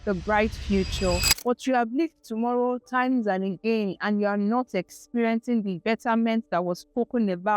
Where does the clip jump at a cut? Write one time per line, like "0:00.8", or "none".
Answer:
0:01.3